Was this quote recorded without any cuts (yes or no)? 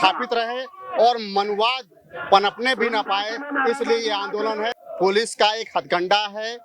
no